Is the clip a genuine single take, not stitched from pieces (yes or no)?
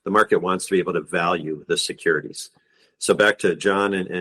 yes